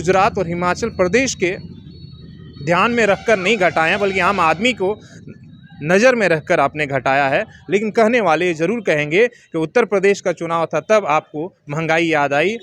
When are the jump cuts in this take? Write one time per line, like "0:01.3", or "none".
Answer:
none